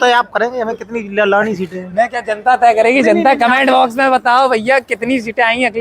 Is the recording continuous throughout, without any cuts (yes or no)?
yes